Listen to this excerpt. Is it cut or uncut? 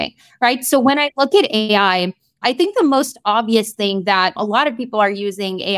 cut